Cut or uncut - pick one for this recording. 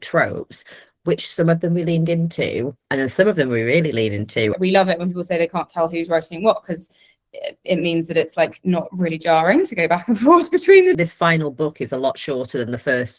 cut